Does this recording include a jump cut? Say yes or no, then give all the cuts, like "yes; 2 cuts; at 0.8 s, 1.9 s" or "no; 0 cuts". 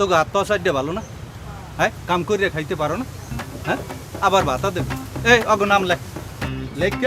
no; 0 cuts